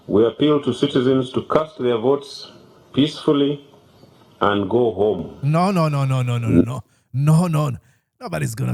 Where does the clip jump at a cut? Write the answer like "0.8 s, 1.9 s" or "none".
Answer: none